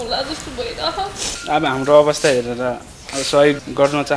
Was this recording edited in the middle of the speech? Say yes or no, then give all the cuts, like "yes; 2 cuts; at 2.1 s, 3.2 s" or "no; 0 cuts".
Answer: yes; 1 cut; at 1.3 s